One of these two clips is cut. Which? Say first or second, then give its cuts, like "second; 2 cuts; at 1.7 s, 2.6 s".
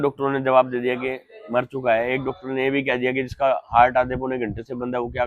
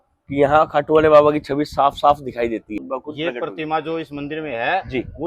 second; 1 cut; at 2.8 s